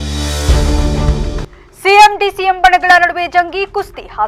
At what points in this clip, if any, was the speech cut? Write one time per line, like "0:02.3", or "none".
0:01.4